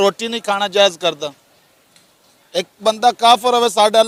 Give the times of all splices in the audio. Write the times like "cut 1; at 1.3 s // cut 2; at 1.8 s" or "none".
none